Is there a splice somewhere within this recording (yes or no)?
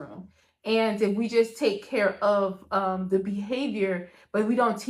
no